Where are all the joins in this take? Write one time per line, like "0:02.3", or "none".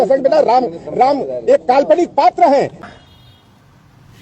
0:02.8